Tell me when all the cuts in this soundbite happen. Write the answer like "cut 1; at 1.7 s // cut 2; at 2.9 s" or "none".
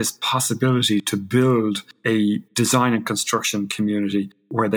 cut 1; at 1.1 s